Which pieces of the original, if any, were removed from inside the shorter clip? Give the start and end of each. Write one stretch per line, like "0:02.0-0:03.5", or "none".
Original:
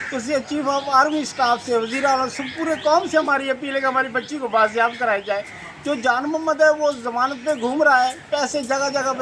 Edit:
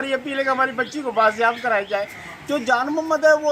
none